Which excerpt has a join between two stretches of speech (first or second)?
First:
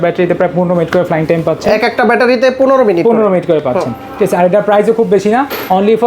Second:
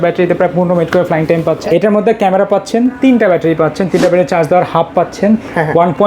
second